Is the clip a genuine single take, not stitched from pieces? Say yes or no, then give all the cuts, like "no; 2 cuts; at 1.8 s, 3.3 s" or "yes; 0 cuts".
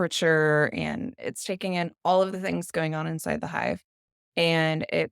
no; 1 cut; at 1.2 s